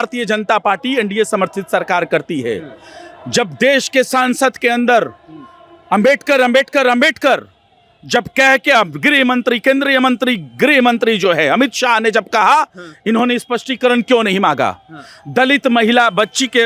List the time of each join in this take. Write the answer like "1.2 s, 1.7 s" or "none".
none